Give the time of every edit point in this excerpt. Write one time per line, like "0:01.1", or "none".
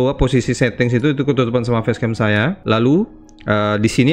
0:02.6